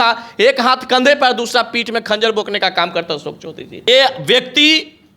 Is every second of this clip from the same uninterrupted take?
no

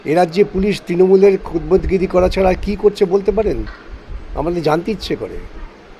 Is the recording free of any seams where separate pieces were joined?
yes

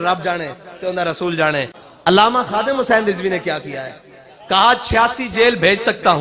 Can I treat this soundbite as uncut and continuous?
no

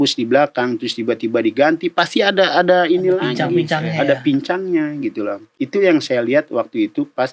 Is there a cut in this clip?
no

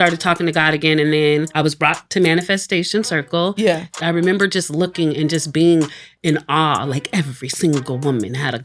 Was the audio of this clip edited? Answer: yes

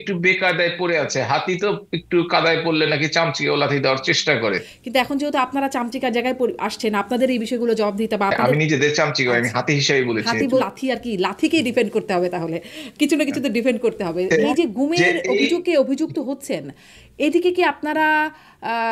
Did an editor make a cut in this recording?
yes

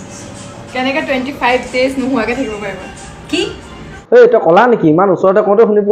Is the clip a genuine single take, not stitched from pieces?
yes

